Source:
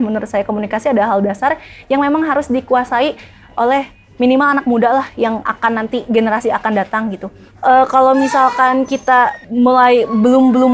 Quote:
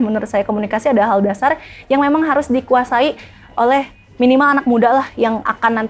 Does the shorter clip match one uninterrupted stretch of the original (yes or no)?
yes